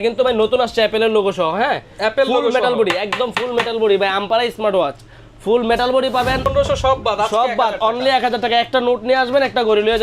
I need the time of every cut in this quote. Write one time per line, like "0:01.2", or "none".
0:06.5